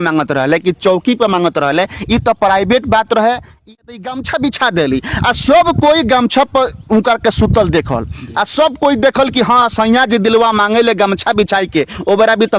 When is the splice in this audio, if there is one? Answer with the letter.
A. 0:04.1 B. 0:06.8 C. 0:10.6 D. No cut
A